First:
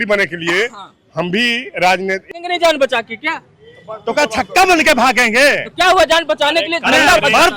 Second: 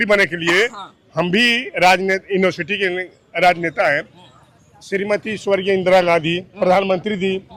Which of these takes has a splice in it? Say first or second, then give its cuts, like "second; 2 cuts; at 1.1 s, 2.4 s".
first; 1 cut; at 2.3 s